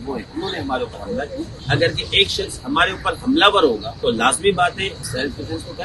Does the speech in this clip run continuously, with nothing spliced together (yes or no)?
no